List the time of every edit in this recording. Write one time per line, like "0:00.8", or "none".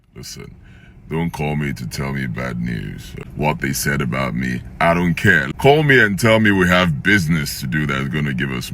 0:03.2
0:05.4